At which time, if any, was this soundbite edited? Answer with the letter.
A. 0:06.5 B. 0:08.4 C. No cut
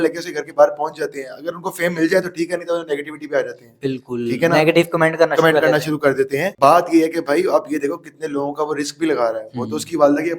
A